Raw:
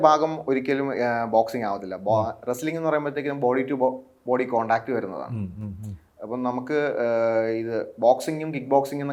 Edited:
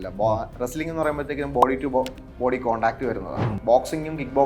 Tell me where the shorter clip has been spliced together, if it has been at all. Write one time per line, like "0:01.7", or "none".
0:03.6